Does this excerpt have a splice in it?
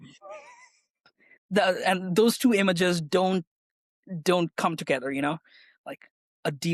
no; 0 cuts

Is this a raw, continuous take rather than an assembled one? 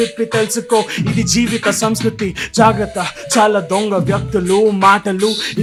yes; 0 cuts

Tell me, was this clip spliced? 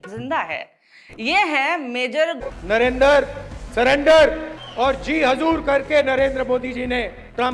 yes; 1 cut; at 2.4 s

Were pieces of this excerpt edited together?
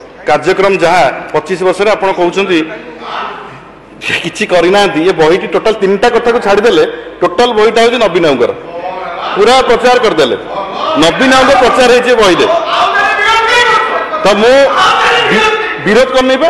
no; 0 cuts

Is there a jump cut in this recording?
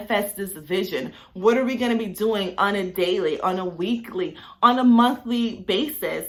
no; 0 cuts

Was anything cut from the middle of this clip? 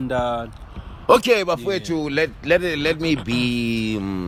no; 0 cuts

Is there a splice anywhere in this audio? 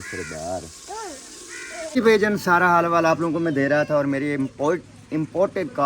yes; 1 cut; at 2.0 s

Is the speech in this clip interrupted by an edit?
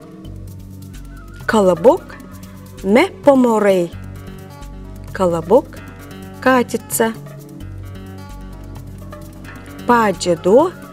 yes; 3 cuts; at 1.0 s, 7.2 s, 9.9 s

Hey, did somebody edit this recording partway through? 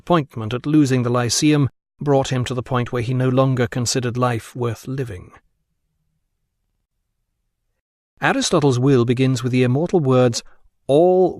yes; 1 cut; at 2.5 s

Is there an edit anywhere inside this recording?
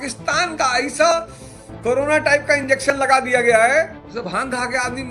yes; 1 cut; at 4.0 s

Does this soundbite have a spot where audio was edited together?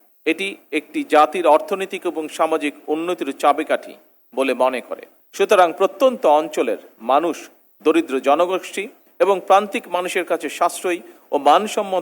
yes; 1 cut; at 5.1 s

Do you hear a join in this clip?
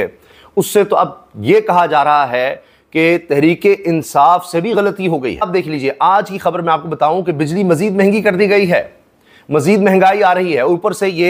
no; 0 cuts

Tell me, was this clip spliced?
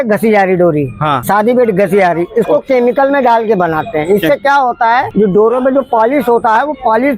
yes; 2 cuts; at 1.1 s, 5.1 s

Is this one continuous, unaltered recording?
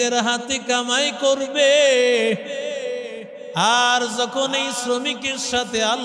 yes; 0 cuts

